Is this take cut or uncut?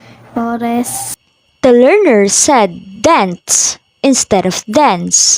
uncut